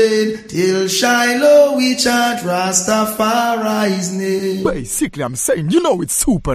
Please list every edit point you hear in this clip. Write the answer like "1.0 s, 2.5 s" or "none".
4.6 s